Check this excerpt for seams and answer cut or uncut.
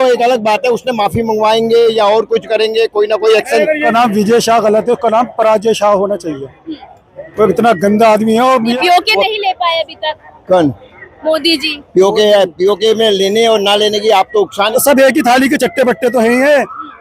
cut